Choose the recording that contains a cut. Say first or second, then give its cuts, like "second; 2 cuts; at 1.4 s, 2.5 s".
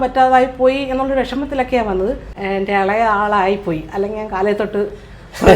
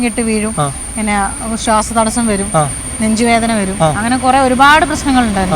first; 1 cut; at 2.3 s